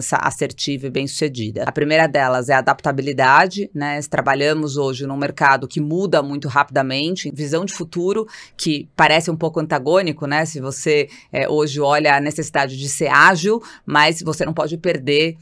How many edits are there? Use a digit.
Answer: 2